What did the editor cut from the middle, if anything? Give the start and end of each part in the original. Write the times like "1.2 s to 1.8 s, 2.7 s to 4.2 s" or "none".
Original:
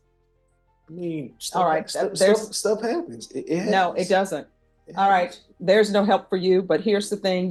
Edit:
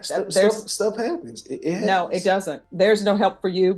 4.4 s to 5.5 s